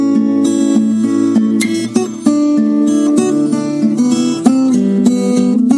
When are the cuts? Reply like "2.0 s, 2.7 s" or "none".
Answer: none